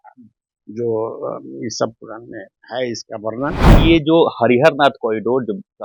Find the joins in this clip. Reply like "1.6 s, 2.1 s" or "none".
3.7 s

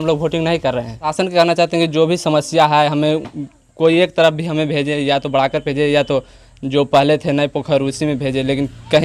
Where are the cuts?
1.1 s

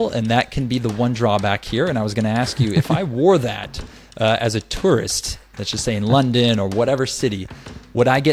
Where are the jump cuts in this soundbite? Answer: none

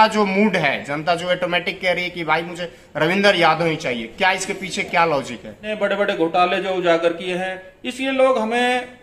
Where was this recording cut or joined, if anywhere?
5.7 s

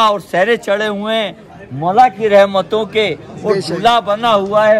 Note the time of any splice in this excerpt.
none

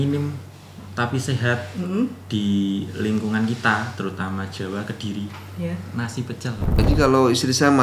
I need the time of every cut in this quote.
6.8 s

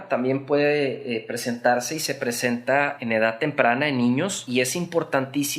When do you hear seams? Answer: 2.9 s, 4.4 s

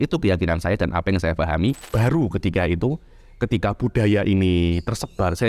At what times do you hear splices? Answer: 1.8 s

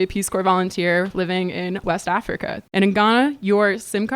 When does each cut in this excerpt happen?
2.6 s

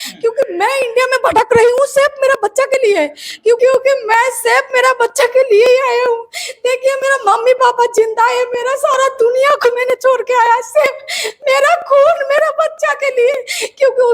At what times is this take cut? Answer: 3.6 s

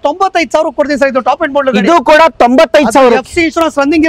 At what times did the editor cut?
none

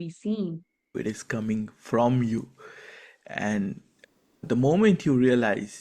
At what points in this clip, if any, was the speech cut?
0.9 s

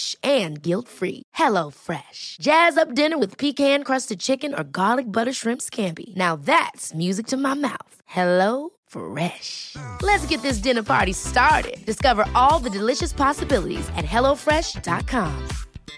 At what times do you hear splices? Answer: none

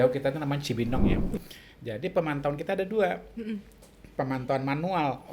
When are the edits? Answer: 1.4 s

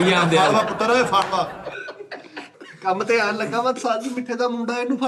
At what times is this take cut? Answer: 2.5 s

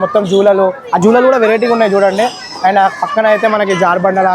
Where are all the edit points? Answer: none

